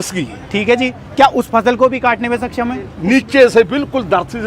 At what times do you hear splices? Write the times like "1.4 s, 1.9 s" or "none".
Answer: 2.9 s